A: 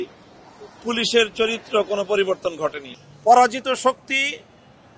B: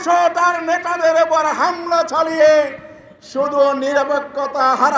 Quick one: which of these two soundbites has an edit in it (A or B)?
A